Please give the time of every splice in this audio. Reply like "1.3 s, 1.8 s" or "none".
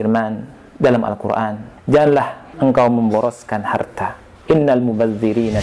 1.7 s, 2.4 s, 4.3 s